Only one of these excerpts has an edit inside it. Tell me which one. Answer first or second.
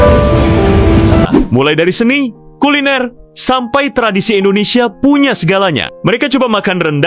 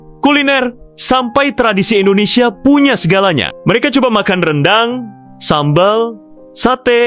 first